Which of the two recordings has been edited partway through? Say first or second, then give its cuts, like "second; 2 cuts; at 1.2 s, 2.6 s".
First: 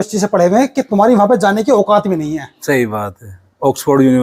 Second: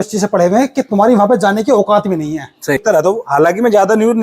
second; 1 cut; at 2.8 s